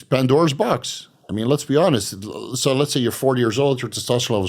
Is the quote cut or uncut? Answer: uncut